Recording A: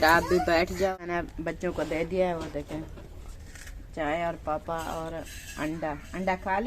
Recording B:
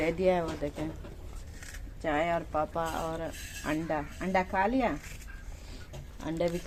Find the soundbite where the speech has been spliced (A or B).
A